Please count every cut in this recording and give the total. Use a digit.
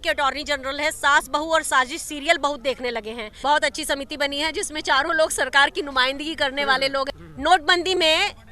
2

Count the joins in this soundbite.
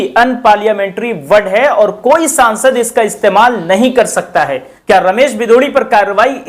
1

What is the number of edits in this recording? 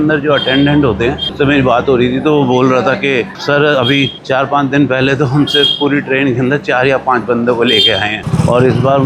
2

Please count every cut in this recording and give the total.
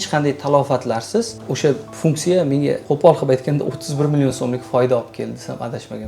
2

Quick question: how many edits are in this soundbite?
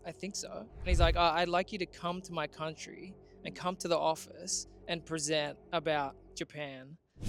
0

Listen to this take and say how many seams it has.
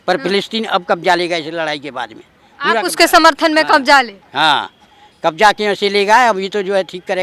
0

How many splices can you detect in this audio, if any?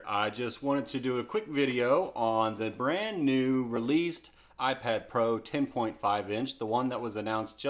0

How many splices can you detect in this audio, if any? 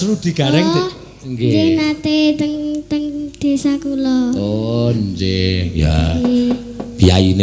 0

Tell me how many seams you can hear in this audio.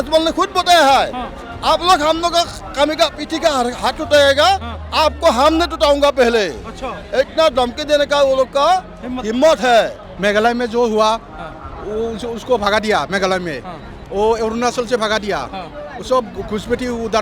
1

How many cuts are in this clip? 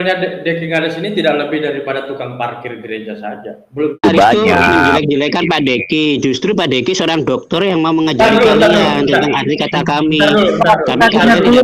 1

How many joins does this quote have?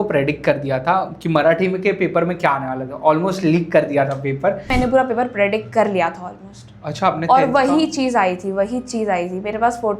1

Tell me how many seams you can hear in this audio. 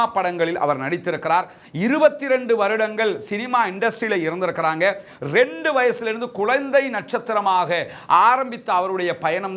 0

